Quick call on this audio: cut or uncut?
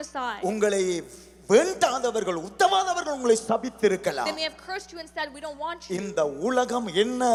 uncut